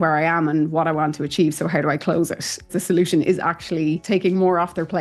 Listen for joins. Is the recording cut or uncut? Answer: cut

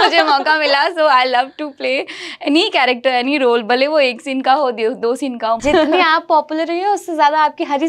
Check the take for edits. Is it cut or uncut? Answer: cut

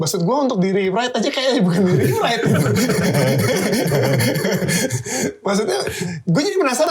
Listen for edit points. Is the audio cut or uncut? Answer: uncut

